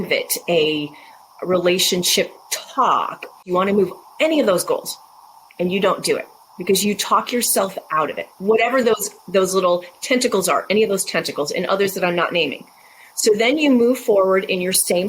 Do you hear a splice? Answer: yes; 1 cut; at 3.4 s

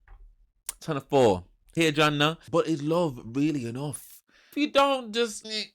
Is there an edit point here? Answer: yes; 2 cuts; at 2.5 s, 4.5 s

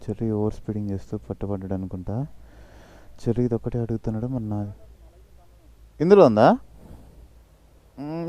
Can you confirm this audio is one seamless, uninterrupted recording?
yes; 0 cuts

